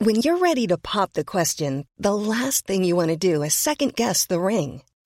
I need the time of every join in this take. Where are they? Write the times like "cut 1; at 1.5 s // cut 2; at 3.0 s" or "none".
none